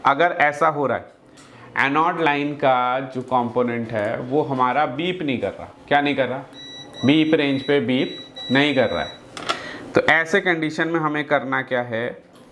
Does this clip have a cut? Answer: no; 0 cuts

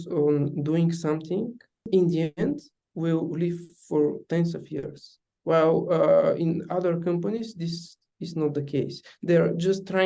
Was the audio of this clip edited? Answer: yes; 1 cut; at 1.9 s

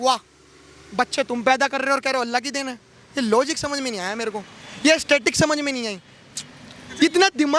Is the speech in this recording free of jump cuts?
yes; 0 cuts

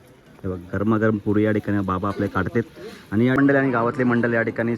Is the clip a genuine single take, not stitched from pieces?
no; 1 cut; at 3.4 s

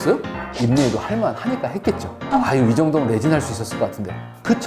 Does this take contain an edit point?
no; 0 cuts

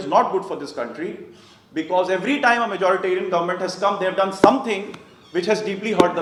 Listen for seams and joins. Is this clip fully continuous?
yes; 0 cuts

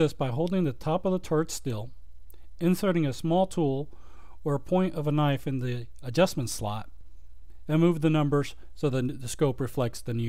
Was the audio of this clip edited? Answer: no; 0 cuts

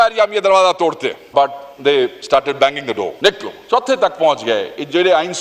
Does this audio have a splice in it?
yes; 2 cuts; at 1.2 s, 3.1 s

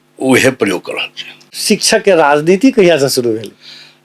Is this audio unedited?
no; 1 cut; at 1.5 s

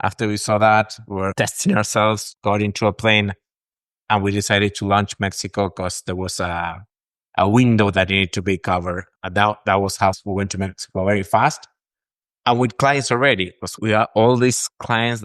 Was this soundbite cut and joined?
yes; 2 cuts; at 1.3 s, 2.3 s

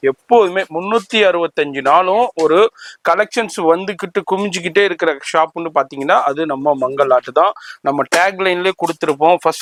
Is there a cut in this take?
no; 0 cuts

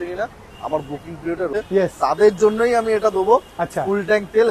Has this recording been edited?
yes; 1 cut; at 1.5 s

